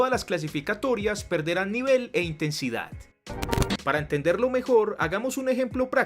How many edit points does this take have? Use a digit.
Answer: 1